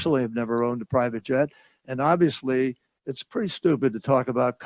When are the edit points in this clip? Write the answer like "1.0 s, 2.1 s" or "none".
none